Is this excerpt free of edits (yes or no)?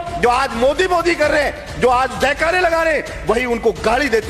yes